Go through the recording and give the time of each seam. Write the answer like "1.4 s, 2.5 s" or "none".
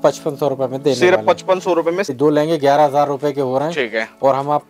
2.2 s